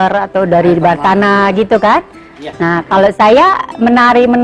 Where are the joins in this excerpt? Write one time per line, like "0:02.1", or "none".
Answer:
none